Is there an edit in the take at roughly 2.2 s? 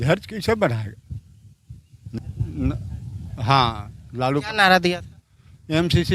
yes; 1 cut; at 2.2 s

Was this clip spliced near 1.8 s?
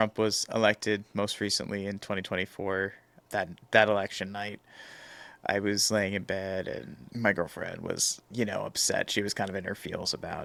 no; 0 cuts

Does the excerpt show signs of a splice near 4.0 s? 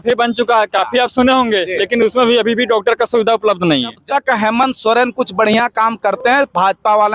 yes; 1 cut; at 4.0 s

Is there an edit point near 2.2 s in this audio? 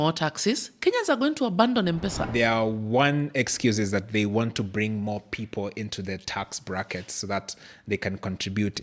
yes; 1 cut; at 2.2 s

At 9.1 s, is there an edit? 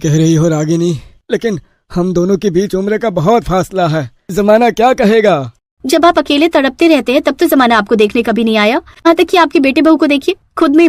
yes; 1 cut; at 9.1 s

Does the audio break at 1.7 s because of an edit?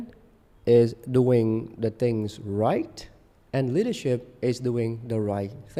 no; 0 cuts

